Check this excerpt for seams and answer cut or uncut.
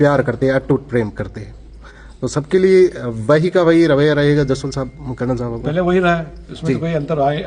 uncut